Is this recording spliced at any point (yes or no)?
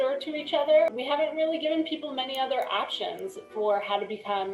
yes